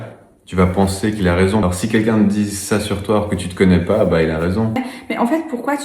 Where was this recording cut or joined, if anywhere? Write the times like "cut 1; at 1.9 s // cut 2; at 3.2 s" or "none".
cut 1; at 1.6 s // cut 2; at 4.8 s